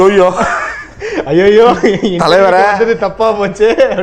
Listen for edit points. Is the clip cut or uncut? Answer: uncut